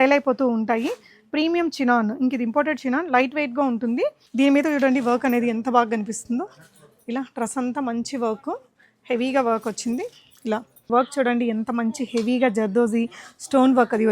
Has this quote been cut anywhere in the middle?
yes; 2 cuts; at 4.2 s, 10.9 s

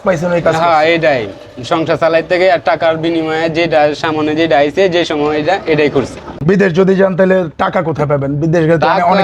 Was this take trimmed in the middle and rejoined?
yes; 1 cut; at 6.3 s

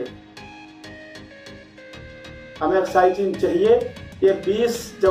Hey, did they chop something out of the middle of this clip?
no; 0 cuts

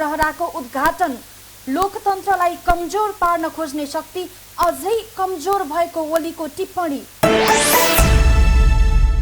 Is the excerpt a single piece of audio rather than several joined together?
yes; 0 cuts

